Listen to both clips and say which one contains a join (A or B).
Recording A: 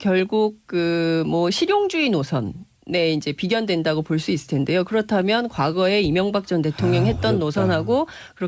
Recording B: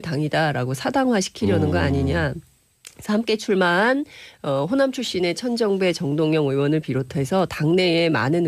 B